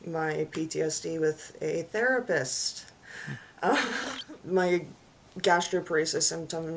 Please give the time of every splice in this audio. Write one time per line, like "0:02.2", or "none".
0:04.1